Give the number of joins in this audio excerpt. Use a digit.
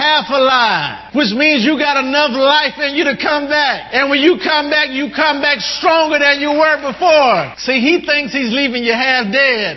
3